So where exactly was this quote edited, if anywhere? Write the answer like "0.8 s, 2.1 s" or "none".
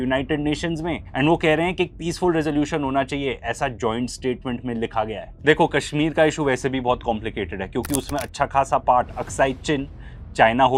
none